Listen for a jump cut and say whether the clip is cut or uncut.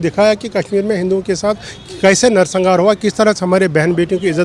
uncut